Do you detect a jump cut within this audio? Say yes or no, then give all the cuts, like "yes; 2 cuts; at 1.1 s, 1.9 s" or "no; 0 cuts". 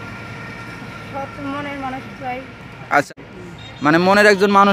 yes; 1 cut; at 3.1 s